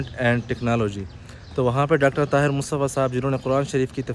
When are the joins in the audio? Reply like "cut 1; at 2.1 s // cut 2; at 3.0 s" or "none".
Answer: none